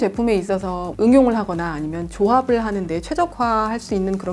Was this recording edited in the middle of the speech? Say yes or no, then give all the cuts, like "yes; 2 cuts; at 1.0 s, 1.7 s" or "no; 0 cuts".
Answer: no; 0 cuts